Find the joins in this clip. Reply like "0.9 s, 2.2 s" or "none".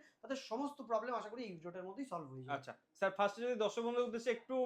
none